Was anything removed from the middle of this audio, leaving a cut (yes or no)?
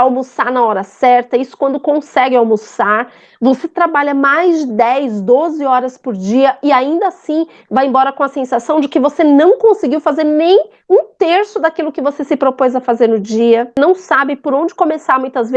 yes